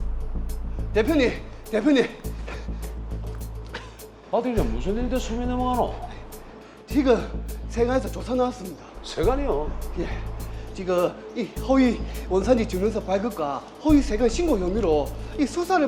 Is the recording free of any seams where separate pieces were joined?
no; 1 cut; at 0.9 s

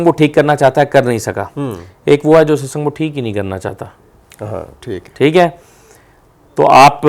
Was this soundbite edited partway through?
no; 0 cuts

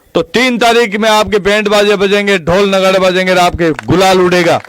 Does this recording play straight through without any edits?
yes; 0 cuts

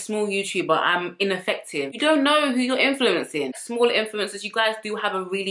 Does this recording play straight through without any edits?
no; 2 cuts; at 1.9 s, 3.6 s

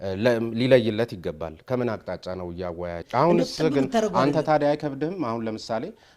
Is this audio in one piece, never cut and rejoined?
no; 1 cut; at 3.0 s

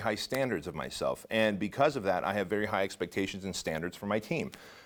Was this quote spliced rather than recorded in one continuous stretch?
no; 0 cuts

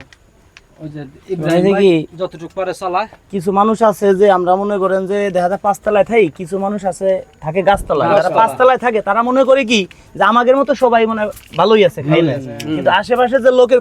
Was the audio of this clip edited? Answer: no; 0 cuts

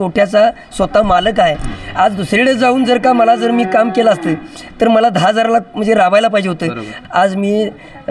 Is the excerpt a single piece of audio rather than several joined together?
no; 1 cut; at 6.9 s

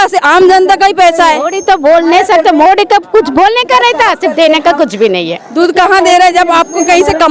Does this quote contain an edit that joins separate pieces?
yes; 2 cuts; at 1.5 s, 5.4 s

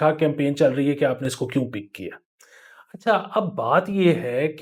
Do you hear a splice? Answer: no; 0 cuts

